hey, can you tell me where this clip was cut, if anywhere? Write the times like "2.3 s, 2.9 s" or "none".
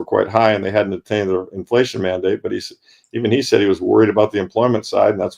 none